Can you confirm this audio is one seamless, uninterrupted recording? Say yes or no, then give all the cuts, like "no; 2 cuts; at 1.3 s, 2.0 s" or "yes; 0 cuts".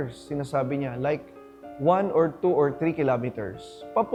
yes; 0 cuts